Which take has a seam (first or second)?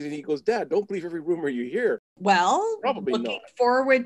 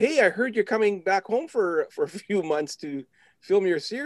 first